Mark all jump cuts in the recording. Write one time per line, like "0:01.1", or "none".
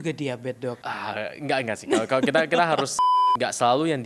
0:00.9
0:03.0